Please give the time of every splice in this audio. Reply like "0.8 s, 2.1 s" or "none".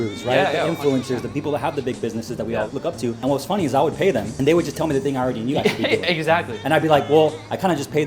1.3 s, 2.9 s, 4.3 s

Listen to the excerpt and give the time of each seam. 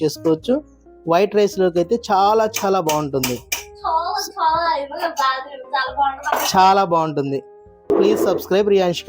7.9 s

